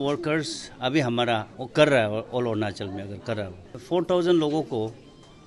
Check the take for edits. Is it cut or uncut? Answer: cut